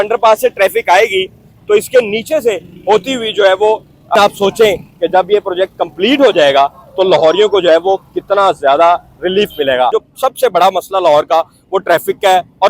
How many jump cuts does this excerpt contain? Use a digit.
2